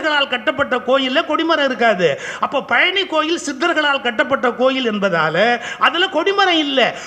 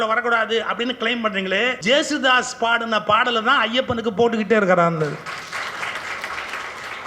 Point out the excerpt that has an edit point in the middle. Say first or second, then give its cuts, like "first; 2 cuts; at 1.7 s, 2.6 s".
second; 1 cut; at 1.8 s